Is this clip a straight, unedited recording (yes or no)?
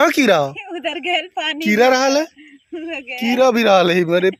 yes